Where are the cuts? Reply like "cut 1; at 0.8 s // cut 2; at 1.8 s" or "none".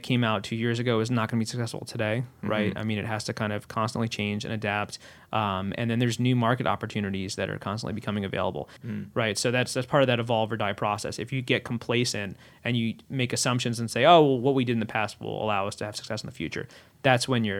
cut 1; at 8.8 s